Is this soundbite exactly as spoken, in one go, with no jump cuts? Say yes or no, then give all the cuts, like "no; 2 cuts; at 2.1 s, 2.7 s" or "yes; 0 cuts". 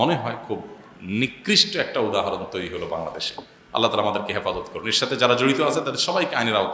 yes; 0 cuts